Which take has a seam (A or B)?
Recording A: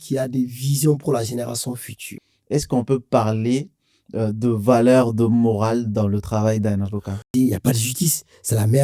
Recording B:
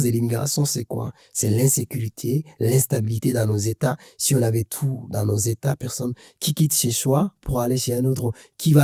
A